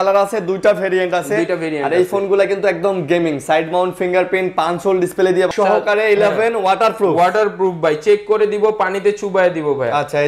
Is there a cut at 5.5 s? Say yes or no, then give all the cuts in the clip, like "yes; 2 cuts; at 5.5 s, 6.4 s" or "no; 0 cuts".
yes; 1 cut; at 5.5 s